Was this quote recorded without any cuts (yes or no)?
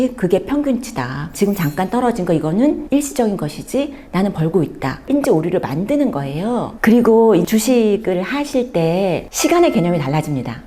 no